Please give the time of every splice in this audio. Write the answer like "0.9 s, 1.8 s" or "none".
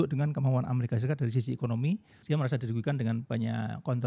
2.1 s